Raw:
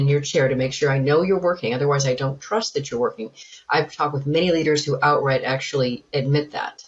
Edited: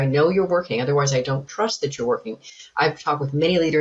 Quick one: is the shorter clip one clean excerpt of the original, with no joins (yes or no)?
yes